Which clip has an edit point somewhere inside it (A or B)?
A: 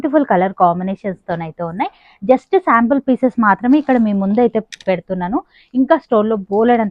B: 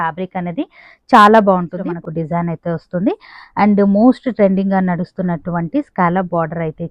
B